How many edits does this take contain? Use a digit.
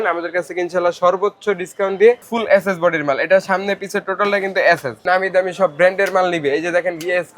2